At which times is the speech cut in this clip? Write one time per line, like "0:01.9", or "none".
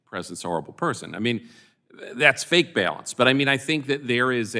none